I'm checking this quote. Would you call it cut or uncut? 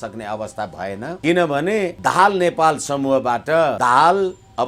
cut